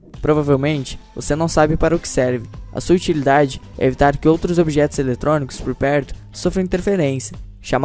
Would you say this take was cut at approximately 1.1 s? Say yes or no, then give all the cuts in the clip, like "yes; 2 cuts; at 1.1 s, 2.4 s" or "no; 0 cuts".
no; 1 cut; at 6.3 s